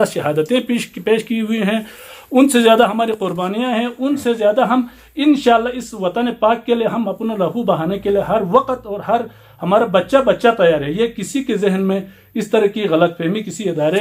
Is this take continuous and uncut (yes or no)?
yes